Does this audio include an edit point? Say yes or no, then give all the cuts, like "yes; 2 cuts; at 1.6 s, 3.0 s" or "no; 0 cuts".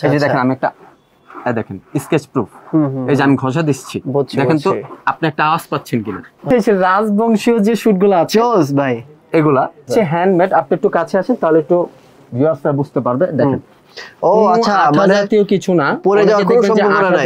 yes; 2 cuts; at 6.4 s, 9.9 s